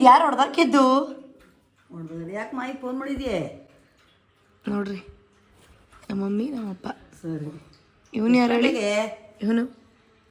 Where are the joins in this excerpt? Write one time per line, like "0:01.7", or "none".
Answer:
none